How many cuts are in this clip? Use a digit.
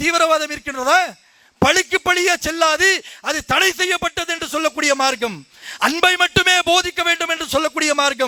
0